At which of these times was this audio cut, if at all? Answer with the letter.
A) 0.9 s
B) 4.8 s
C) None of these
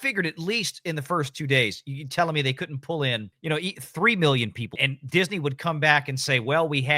B